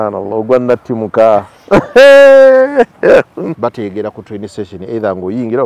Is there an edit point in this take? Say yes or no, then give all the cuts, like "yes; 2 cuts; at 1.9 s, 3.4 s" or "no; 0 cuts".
yes; 1 cut; at 3.6 s